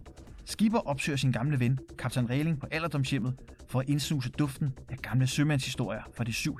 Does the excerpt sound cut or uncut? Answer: uncut